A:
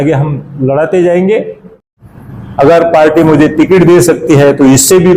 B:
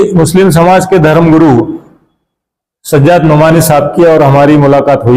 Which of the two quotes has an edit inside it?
A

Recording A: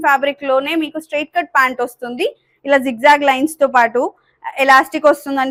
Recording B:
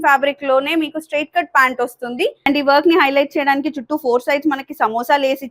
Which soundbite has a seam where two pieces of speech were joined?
B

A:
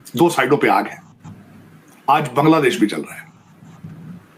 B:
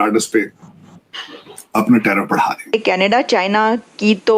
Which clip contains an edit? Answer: B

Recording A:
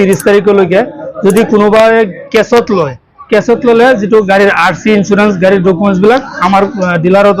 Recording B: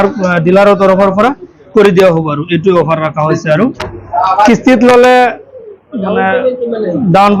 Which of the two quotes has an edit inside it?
B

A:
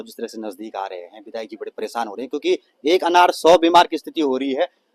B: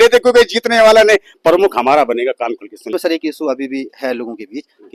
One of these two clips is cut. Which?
B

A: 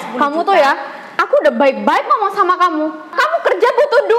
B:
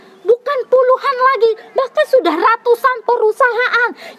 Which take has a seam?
A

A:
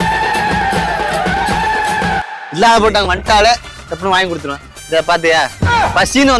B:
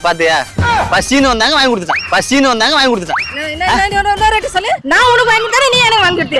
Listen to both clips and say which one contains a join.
B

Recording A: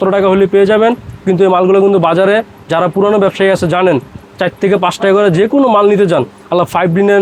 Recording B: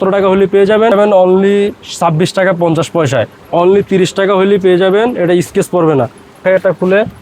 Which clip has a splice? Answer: B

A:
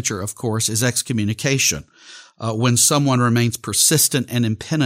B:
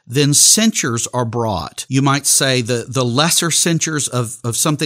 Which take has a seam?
B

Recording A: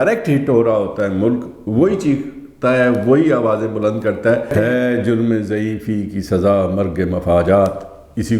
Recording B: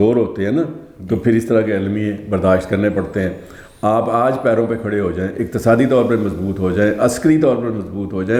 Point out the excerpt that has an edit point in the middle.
A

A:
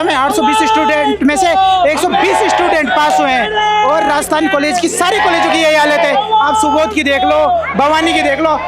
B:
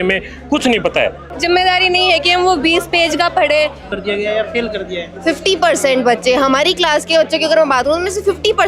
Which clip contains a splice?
B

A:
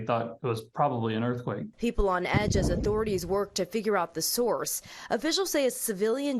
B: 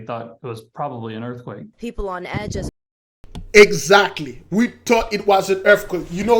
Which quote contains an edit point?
A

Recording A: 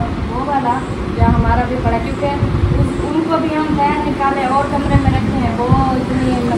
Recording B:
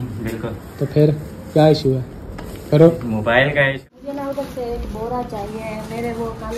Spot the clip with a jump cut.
B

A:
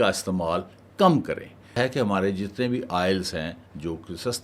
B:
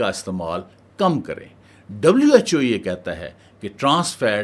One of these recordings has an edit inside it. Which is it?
A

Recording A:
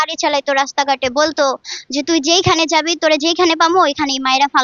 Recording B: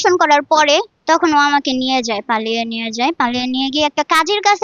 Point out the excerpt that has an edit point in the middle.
B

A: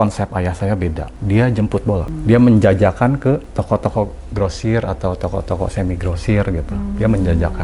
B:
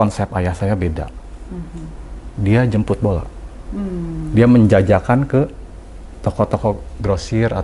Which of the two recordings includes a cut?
A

